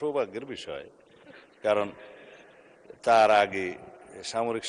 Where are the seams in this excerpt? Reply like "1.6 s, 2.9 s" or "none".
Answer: none